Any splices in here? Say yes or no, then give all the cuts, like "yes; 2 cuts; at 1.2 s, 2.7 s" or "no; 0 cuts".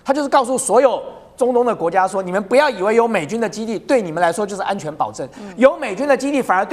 no; 0 cuts